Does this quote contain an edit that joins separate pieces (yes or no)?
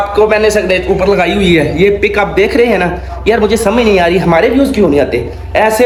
no